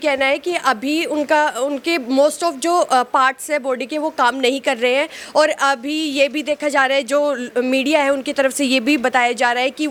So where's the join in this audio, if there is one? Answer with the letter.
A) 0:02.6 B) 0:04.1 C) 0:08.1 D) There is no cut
D